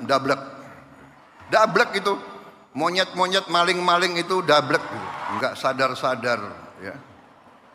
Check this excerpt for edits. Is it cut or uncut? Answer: cut